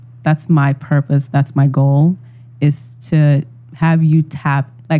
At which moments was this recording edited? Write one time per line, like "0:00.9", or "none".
none